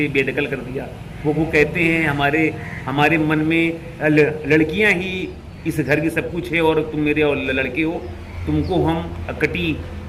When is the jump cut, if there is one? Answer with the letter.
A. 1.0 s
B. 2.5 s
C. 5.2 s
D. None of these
D